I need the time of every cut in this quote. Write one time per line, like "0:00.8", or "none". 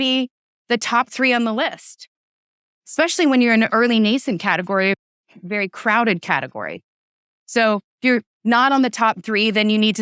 none